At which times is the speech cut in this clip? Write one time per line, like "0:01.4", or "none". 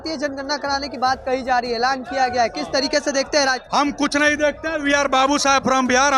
none